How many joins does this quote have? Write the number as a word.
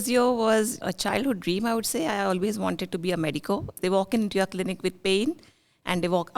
two